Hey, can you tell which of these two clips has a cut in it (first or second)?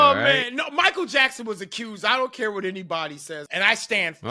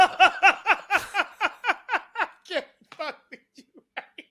first